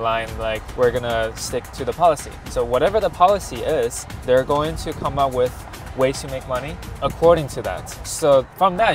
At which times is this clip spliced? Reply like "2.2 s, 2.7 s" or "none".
none